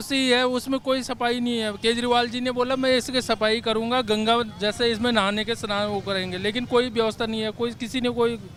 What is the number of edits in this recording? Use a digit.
0